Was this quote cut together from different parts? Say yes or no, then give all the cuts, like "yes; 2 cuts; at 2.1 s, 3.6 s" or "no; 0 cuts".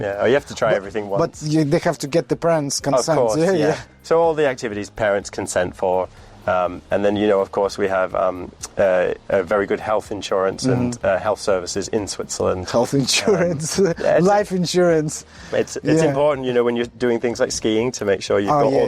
no; 0 cuts